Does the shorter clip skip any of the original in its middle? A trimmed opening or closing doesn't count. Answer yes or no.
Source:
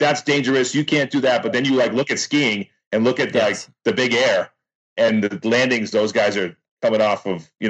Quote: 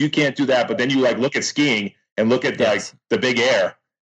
no